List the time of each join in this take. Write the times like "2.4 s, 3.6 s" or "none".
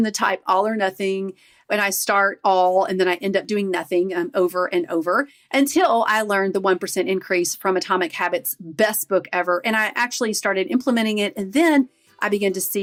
none